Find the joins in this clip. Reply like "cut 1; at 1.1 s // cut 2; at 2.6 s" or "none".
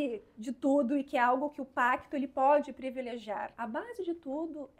cut 1; at 3.5 s